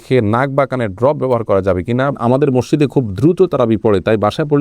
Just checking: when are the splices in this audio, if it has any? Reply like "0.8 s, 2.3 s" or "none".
2.2 s